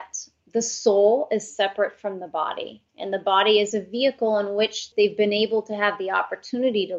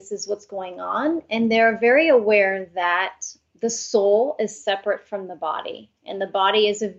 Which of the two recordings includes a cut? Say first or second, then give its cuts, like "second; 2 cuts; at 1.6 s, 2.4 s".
first; 1 cut; at 4.9 s